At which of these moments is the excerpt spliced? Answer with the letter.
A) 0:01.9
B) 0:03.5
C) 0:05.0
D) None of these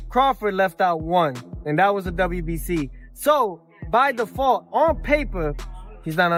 D